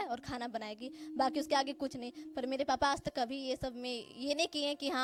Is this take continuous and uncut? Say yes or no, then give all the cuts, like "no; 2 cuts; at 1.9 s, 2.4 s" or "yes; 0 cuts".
yes; 0 cuts